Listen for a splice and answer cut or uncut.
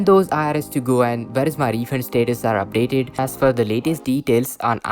cut